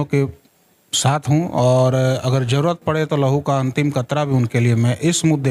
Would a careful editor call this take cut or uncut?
uncut